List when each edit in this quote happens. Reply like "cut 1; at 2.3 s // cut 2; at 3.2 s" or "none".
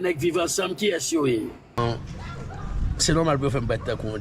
cut 1; at 1.8 s